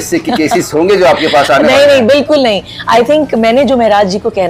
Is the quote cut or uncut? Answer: uncut